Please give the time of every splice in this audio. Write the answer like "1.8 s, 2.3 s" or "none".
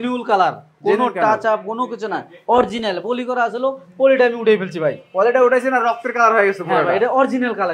none